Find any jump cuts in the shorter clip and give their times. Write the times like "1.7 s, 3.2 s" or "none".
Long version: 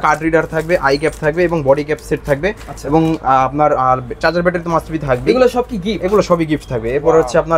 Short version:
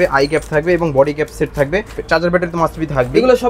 2.0 s